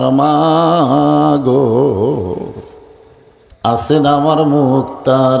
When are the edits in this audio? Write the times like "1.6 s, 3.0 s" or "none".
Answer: 3.9 s